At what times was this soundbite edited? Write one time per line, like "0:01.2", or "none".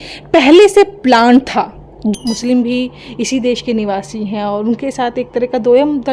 0:02.1